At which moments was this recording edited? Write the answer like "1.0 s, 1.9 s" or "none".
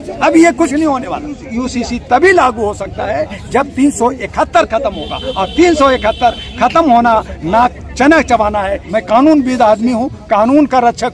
1.5 s, 8.8 s